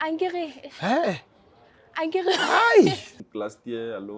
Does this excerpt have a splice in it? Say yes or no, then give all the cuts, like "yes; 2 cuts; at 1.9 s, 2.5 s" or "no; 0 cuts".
yes; 1 cut; at 3.1 s